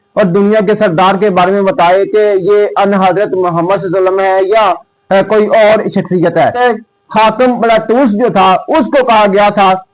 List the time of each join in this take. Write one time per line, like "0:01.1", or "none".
0:06.6